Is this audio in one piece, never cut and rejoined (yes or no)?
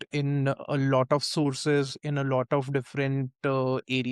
yes